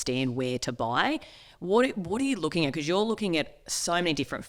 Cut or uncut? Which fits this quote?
uncut